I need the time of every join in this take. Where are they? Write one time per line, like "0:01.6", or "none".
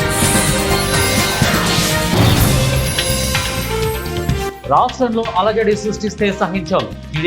0:04.5